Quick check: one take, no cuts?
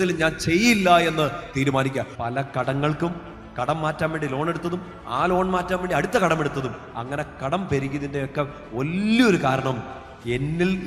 no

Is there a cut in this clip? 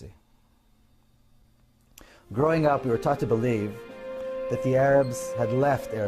yes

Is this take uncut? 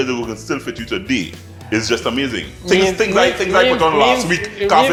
yes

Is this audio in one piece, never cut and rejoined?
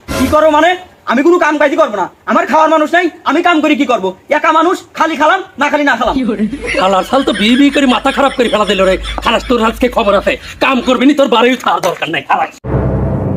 yes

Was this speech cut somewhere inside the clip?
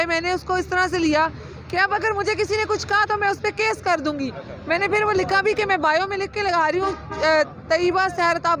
no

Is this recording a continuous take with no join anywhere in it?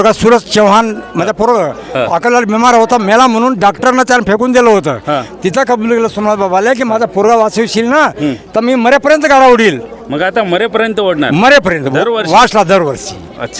yes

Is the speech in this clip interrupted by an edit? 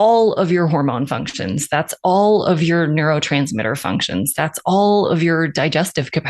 no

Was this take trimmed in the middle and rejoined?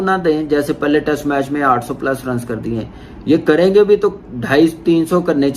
yes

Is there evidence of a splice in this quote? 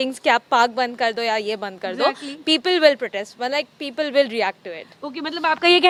no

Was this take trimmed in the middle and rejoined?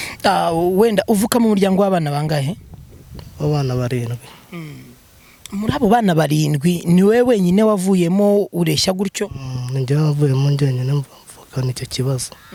no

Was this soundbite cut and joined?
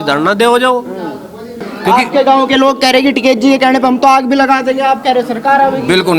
yes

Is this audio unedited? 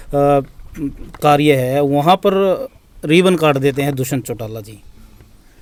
yes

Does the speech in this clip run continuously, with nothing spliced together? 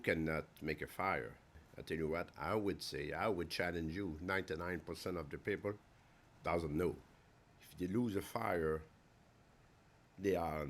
no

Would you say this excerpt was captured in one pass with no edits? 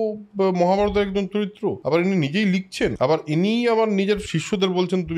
no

